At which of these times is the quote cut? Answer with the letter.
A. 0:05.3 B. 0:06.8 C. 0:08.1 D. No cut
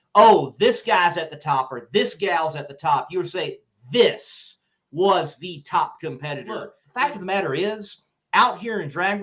B